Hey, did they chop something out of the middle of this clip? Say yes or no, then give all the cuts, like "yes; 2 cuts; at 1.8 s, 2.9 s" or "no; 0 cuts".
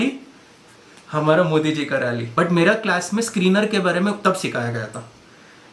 yes; 1 cut; at 2.2 s